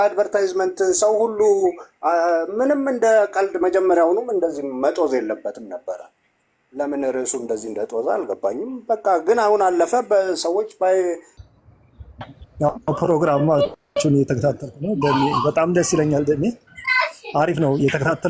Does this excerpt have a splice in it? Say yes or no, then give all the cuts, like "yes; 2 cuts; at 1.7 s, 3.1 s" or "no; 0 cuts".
yes; 1 cut; at 11.3 s